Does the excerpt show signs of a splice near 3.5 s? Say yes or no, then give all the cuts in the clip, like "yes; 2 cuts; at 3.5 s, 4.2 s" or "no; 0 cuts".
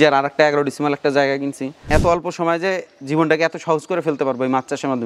no; 1 cut; at 1.9 s